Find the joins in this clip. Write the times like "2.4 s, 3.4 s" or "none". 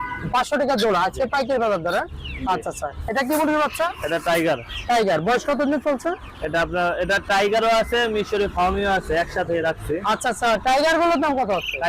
none